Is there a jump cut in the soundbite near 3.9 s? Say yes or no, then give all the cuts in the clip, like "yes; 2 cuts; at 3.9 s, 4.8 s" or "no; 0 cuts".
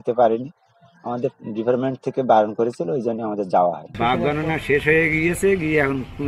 yes; 1 cut; at 3.9 s